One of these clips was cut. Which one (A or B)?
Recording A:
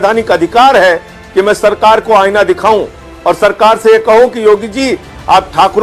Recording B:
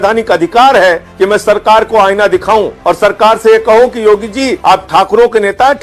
B